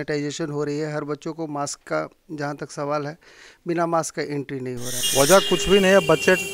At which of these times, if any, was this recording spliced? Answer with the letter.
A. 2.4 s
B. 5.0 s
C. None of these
B